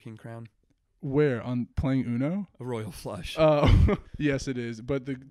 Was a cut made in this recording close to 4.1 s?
yes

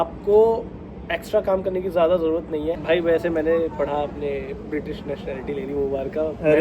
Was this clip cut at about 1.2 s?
no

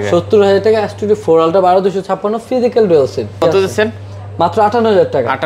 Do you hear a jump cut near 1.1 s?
no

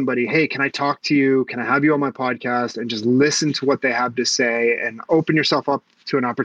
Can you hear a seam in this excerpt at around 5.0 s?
yes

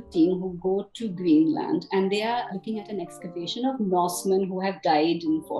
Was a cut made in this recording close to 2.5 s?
yes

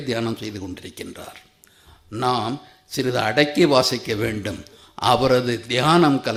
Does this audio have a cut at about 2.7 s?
no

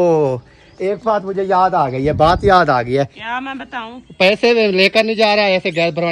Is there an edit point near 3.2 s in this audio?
yes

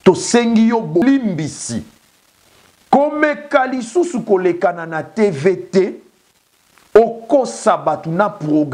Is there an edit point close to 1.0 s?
yes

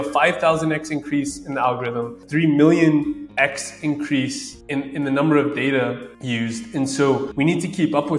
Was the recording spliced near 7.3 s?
yes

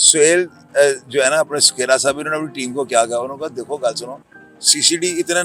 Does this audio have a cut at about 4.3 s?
no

